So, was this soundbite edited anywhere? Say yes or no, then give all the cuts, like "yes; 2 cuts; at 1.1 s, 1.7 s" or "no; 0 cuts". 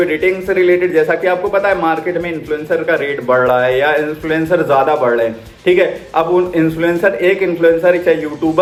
no; 0 cuts